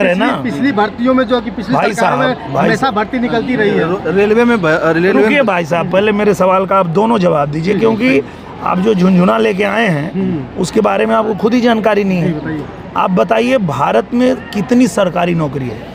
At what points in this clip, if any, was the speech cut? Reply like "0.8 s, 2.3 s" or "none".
none